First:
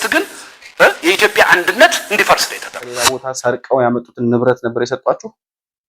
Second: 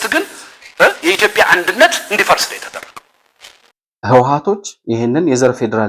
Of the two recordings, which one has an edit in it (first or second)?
first